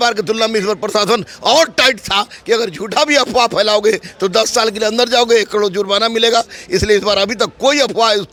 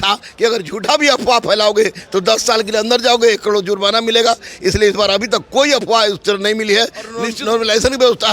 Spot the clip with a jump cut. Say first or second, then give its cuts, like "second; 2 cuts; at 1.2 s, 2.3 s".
second; 1 cut; at 7.2 s